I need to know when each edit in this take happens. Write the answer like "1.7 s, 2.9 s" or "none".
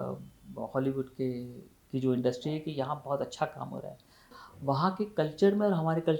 4.3 s